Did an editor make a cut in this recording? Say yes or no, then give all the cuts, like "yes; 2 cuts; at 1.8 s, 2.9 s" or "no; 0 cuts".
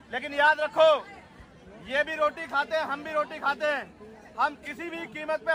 no; 0 cuts